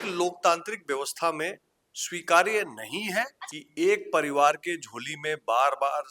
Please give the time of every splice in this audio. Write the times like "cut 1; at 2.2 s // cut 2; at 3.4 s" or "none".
cut 1; at 3.4 s